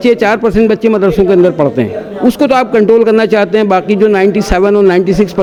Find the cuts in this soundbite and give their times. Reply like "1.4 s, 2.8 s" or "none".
none

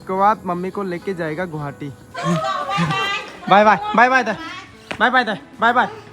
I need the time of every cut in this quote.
2.1 s

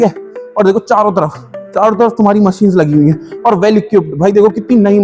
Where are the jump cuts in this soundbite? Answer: none

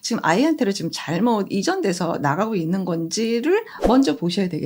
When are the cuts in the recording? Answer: 3.7 s

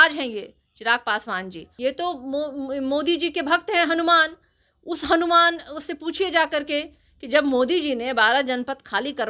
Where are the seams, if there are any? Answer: 1.6 s

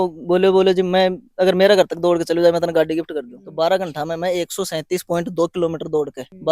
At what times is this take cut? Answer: 3.4 s

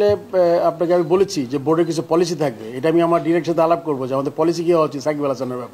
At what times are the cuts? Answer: none

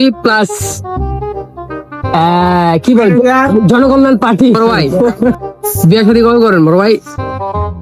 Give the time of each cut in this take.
5.4 s

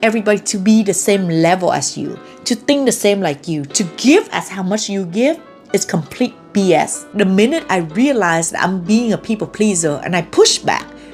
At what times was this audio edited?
7.0 s

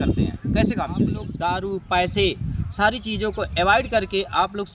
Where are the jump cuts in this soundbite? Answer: 1.3 s

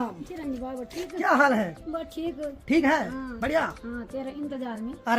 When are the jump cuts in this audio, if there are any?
none

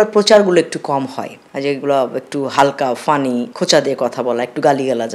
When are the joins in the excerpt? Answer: none

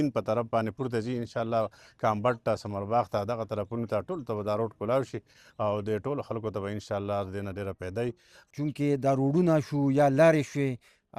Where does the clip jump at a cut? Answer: 8.4 s

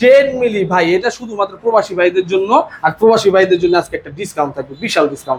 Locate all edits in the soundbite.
none

